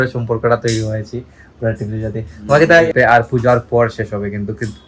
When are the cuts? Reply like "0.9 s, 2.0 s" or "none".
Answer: 2.9 s